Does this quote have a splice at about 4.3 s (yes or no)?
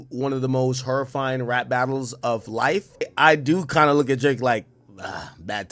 no